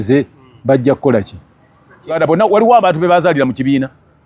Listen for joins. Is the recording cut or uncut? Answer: cut